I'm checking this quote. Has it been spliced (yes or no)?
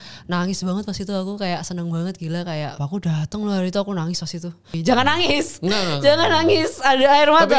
yes